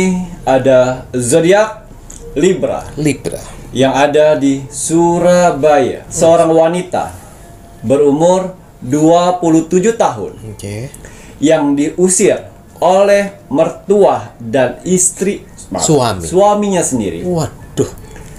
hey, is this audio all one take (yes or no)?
no